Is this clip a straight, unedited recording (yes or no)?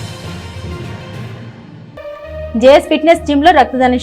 yes